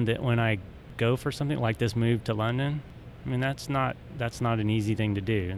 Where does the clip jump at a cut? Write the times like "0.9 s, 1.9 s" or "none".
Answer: none